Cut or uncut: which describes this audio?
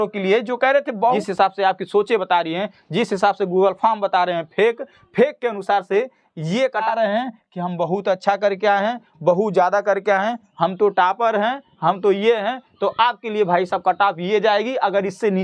cut